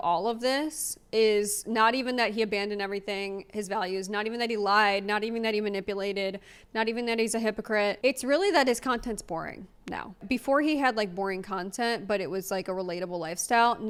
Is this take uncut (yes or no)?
yes